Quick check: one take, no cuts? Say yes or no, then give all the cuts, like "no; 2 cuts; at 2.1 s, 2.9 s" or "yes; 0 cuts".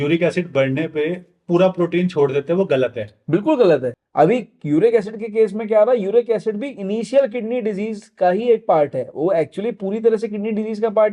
no; 1 cut; at 3.9 s